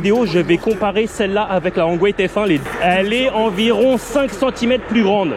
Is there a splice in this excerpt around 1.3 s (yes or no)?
no